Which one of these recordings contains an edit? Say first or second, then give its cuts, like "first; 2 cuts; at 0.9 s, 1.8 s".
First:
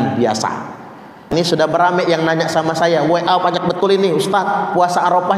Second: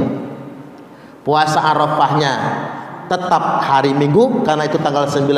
first; 1 cut; at 1.3 s